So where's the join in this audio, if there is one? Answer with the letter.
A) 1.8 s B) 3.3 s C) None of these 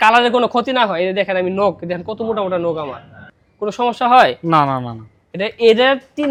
C